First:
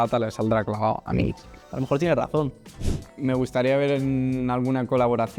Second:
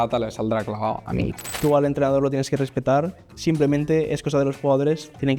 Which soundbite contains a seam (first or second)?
second